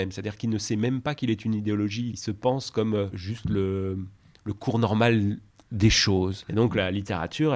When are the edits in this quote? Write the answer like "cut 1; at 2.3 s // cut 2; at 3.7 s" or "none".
cut 1; at 2.2 s // cut 2; at 3.2 s // cut 3; at 6.4 s